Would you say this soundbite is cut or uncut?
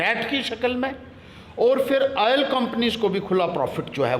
uncut